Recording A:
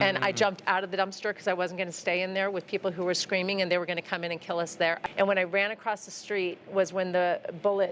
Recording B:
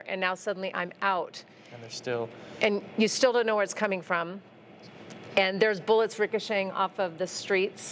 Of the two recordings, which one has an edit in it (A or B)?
A